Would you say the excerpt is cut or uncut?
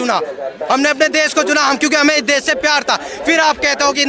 uncut